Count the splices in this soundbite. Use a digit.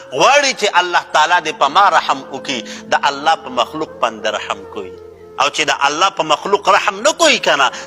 0